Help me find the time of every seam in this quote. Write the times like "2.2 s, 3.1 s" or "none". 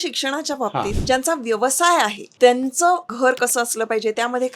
1.0 s, 2.2 s, 3.1 s